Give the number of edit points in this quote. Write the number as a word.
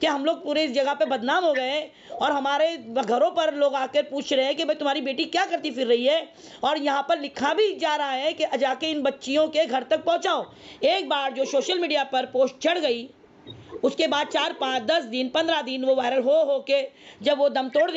one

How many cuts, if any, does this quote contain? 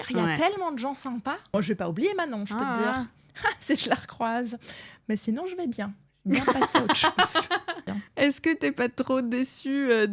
two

